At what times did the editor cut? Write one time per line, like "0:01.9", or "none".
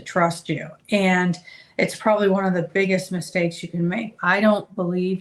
0:04.1